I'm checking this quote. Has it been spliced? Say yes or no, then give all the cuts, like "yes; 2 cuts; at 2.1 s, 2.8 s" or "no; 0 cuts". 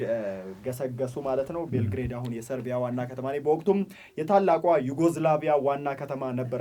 no; 0 cuts